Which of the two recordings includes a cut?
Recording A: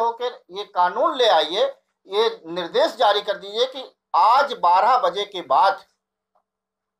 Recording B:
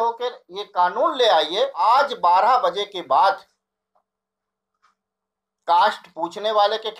B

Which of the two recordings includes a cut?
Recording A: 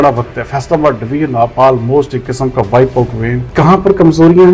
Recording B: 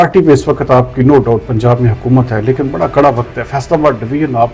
A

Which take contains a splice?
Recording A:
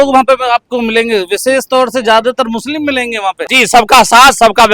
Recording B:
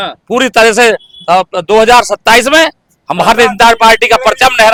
A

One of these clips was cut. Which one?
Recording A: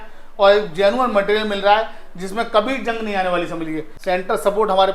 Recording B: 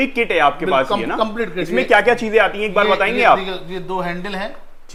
A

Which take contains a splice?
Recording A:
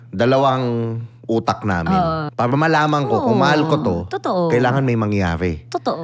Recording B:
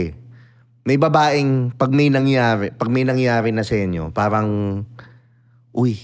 A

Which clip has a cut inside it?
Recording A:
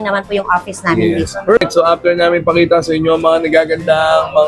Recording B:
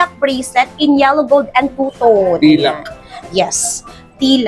A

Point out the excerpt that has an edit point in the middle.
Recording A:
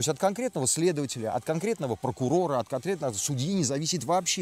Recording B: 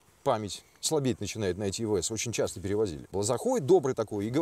B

